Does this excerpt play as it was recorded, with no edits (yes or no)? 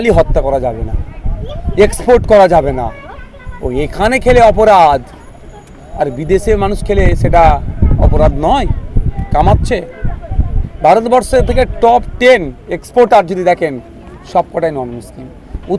yes